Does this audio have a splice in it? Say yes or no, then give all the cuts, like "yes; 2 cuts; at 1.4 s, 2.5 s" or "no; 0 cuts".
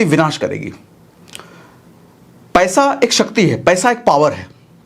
no; 0 cuts